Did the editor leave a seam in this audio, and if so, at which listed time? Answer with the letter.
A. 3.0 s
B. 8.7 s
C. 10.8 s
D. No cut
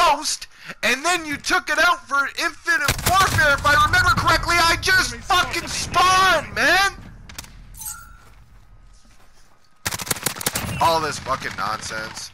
C